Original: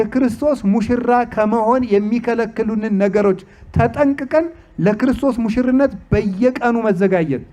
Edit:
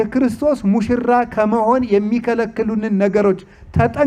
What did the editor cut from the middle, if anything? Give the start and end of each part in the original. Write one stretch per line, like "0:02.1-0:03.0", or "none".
none